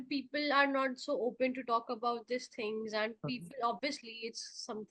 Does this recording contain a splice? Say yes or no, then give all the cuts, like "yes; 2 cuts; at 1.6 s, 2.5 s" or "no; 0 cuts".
no; 0 cuts